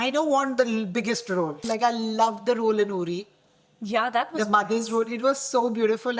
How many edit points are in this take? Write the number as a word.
one